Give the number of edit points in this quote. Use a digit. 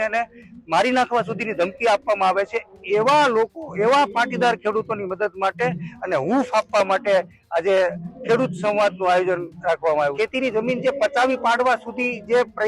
1